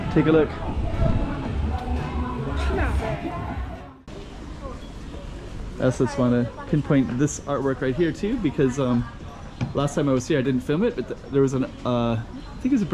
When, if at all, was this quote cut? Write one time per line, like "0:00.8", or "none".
0:03.7